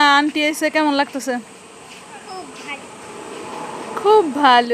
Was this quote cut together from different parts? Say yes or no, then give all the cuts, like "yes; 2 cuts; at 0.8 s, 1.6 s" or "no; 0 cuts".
no; 0 cuts